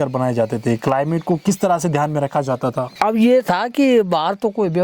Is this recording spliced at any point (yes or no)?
yes